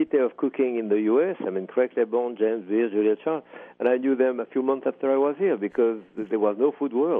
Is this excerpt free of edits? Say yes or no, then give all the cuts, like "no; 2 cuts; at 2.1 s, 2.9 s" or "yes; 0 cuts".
yes; 0 cuts